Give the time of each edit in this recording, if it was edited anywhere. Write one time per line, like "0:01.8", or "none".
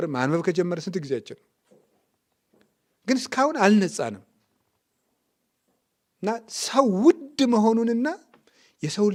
none